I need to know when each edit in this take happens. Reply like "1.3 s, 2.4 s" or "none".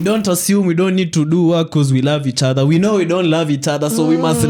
none